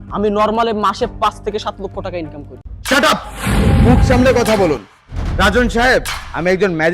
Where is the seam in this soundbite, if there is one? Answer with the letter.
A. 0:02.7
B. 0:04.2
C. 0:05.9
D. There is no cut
A